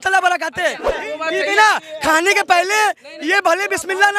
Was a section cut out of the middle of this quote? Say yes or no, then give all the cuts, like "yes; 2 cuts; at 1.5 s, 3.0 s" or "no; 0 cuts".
yes; 1 cut; at 1.0 s